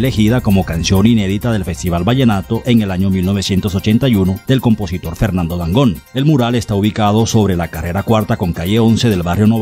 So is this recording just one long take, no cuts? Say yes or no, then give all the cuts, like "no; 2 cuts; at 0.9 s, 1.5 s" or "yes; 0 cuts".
yes; 0 cuts